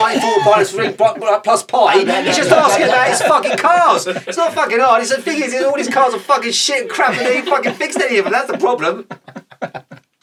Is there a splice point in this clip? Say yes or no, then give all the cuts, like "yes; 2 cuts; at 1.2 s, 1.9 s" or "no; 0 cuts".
no; 0 cuts